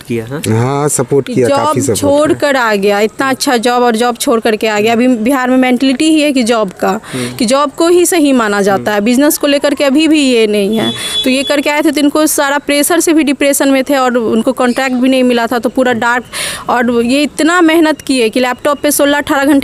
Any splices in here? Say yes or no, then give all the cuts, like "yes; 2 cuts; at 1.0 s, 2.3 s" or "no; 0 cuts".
no; 0 cuts